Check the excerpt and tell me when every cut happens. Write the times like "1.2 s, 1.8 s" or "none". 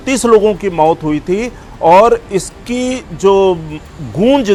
none

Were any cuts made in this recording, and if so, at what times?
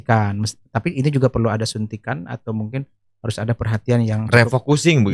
none

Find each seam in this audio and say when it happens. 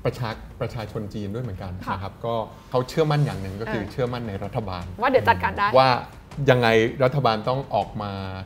2.6 s

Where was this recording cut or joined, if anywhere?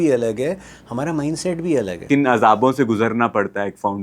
2.0 s

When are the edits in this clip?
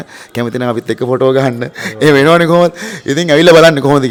none

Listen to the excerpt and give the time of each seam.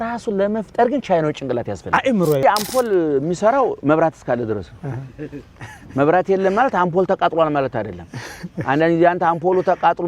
2.4 s

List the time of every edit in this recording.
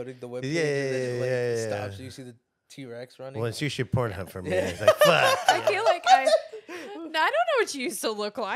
5.4 s

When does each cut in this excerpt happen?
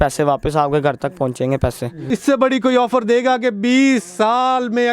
2.0 s

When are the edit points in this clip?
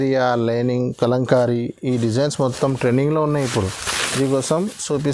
none

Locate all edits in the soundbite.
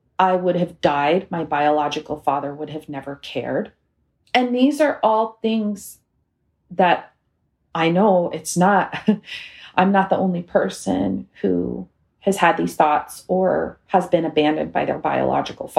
none

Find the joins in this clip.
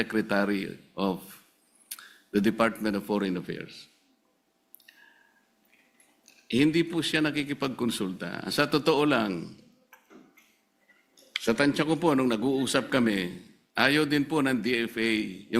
none

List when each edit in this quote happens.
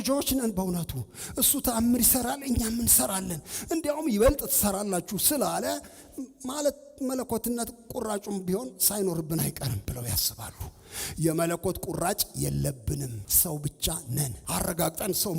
9.8 s, 13.2 s, 14.4 s

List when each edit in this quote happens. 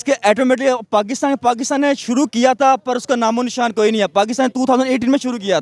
none

